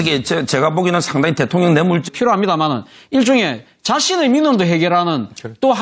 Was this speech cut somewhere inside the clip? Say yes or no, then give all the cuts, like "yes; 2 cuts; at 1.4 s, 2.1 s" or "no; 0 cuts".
no; 0 cuts